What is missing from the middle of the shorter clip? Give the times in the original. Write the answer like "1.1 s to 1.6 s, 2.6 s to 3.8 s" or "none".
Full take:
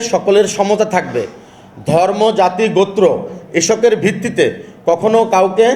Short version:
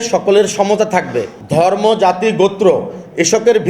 1.3 s to 1.7 s